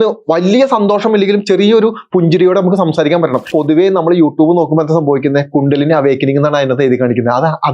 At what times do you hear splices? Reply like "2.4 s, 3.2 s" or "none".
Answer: 3.5 s